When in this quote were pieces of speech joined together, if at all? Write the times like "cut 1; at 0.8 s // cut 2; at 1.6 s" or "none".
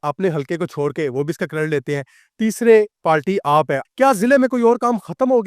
cut 1; at 3.8 s